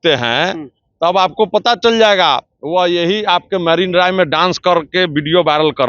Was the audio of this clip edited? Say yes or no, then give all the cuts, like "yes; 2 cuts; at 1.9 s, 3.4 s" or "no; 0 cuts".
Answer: no; 0 cuts